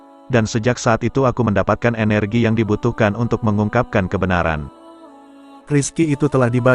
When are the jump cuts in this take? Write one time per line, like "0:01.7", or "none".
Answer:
0:04.6